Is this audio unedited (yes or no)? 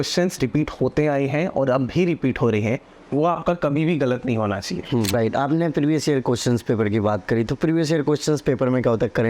no